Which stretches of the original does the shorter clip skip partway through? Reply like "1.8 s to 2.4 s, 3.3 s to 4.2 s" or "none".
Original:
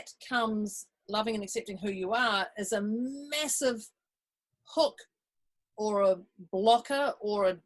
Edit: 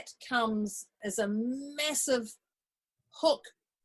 1.0 s to 2.5 s